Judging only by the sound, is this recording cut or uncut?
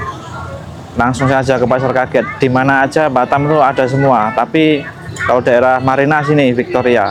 uncut